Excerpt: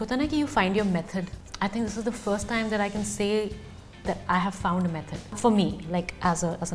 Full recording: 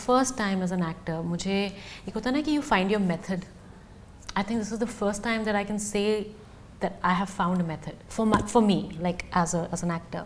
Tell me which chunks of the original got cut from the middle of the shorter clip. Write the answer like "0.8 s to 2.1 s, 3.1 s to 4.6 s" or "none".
3.6 s to 4.2 s, 8.1 s to 8.5 s